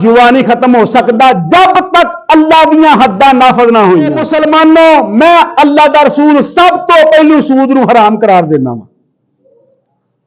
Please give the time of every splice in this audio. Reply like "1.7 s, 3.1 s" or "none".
4.3 s